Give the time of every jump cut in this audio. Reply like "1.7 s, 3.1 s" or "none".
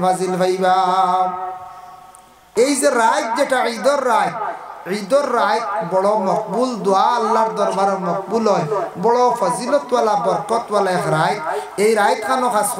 2.4 s